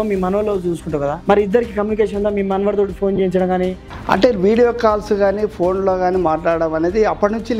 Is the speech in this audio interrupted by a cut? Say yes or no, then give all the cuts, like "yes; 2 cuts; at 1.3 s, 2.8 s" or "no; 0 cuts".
yes; 2 cuts; at 1.2 s, 3.8 s